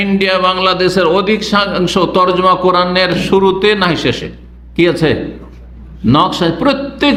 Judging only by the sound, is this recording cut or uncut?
uncut